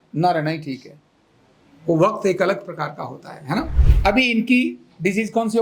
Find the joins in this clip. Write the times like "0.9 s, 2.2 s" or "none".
3.8 s